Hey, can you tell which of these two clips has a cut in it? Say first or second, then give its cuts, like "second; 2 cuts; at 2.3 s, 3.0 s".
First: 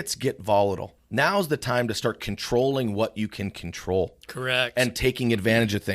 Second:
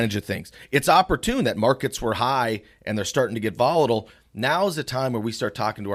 first; 1 cut; at 1.0 s